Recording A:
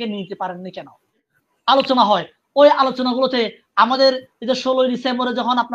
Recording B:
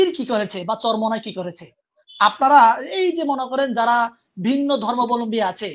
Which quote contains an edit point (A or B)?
A